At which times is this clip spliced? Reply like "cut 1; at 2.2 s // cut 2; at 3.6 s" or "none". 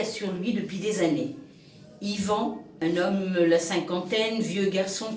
cut 1; at 2.7 s